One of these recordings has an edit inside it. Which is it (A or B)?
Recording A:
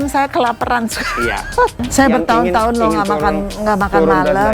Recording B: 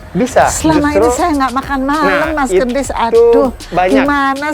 A